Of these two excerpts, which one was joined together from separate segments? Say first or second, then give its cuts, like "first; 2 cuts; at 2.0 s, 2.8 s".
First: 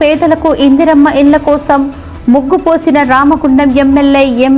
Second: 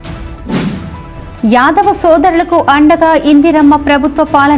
second; 1 cut; at 1.0 s